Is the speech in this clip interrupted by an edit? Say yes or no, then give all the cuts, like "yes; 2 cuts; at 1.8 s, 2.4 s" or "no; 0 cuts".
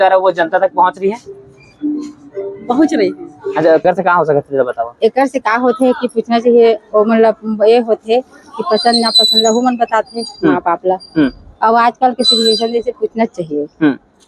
yes; 1 cut; at 3.8 s